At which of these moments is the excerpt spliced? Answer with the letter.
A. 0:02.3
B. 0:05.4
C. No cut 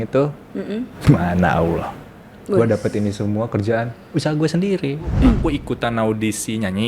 B